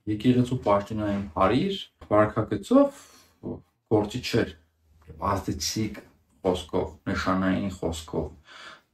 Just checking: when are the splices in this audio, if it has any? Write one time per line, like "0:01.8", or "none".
0:02.0

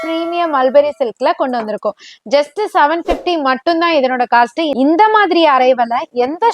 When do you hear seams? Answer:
0:04.7

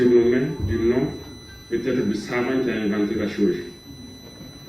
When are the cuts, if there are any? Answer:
none

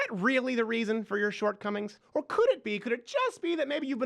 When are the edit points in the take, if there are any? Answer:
0:02.0

